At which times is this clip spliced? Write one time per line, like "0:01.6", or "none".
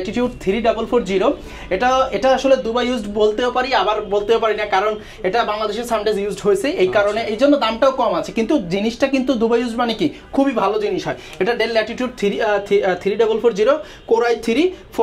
none